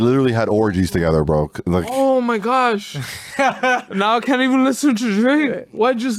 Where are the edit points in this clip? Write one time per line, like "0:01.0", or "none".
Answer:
none